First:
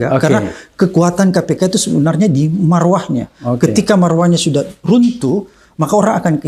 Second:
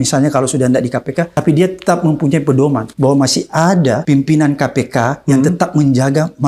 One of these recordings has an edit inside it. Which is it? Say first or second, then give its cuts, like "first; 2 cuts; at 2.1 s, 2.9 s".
second; 3 cuts; at 1.3 s, 2.9 s, 4.0 s